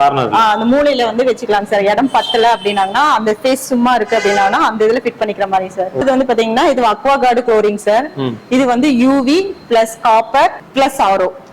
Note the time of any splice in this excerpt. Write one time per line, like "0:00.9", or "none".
0:06.0
0:10.6